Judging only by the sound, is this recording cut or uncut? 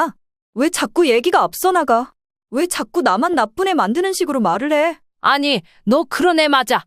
cut